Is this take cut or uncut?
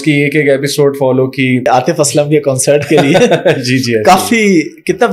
cut